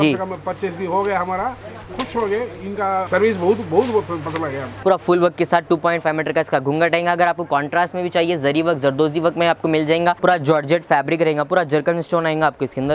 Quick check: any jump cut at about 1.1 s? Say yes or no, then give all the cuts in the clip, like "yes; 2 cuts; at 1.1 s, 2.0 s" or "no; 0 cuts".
no; 3 cuts; at 3.1 s, 4.7 s, 10.2 s